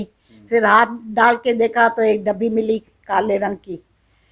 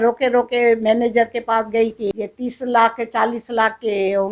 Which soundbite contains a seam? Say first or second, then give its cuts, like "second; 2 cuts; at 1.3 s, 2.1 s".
second; 1 cut; at 2.1 s